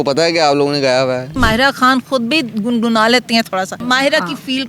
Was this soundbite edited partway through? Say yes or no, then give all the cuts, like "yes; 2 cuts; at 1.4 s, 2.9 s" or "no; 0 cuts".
yes; 2 cuts; at 1.4 s, 3.8 s